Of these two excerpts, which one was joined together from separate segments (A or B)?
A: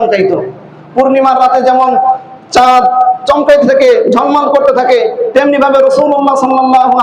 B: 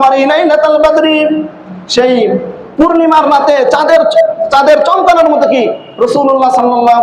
B